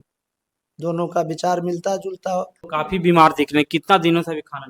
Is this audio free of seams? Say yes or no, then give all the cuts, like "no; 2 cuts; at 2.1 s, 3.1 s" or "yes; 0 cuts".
no; 1 cut; at 2.6 s